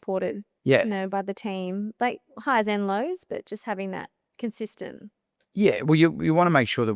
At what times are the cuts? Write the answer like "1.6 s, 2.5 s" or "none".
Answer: none